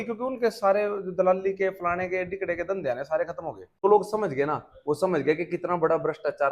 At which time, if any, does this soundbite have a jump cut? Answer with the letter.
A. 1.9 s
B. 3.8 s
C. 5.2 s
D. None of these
B